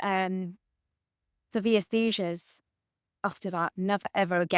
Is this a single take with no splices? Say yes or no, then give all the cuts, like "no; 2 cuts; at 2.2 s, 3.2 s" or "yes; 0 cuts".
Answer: no; 1 cut; at 3.6 s